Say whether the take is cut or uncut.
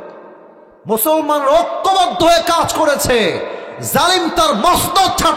uncut